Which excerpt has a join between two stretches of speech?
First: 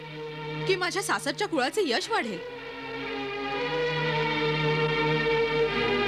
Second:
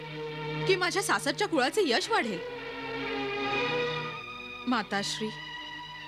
second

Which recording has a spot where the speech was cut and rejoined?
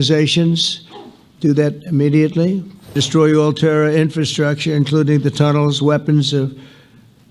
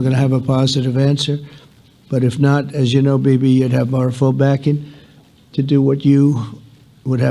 first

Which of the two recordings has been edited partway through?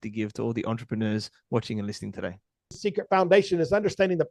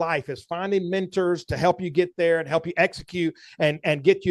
first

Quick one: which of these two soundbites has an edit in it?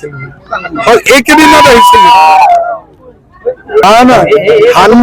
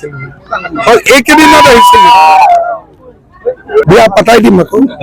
second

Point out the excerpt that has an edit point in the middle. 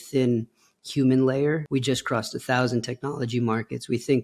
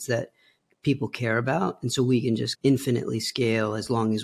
first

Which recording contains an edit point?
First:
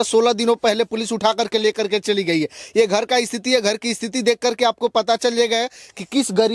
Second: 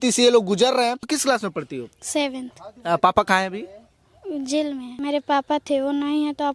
second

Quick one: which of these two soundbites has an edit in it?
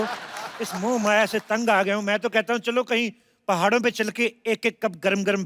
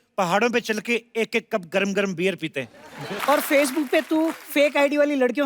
second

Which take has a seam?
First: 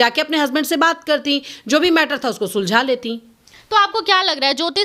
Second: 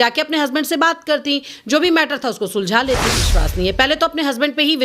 second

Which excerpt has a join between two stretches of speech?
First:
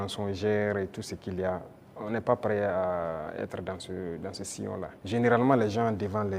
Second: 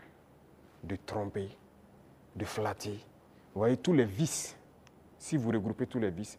first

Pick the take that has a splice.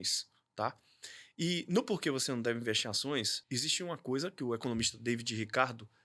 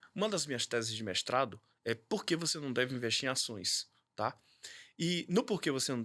first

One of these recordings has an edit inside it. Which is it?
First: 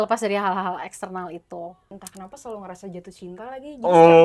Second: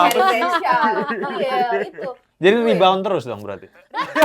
first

